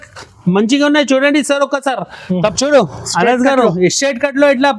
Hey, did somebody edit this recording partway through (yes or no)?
yes